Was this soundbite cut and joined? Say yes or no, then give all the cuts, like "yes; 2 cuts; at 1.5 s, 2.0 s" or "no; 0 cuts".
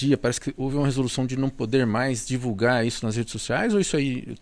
no; 0 cuts